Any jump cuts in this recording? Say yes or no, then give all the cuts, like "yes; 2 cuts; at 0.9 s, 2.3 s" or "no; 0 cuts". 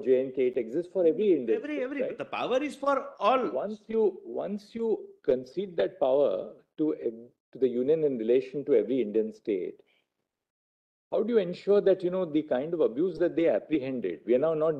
no; 0 cuts